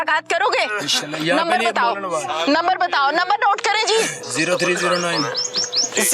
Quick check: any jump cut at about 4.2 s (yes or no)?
yes